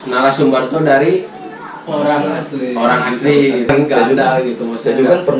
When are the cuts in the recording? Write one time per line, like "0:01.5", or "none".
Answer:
0:03.7